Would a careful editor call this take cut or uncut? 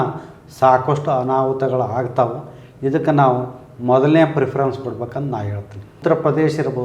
cut